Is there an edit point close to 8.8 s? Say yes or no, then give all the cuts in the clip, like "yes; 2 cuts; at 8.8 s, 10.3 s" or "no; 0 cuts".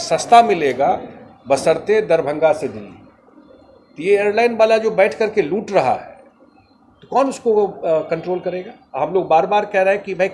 yes; 1 cut; at 8.8 s